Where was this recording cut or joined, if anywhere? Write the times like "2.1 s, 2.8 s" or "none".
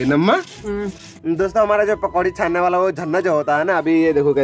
1.1 s